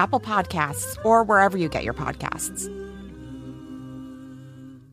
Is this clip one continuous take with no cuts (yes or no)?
no